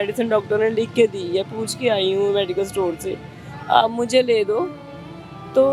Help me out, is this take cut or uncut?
uncut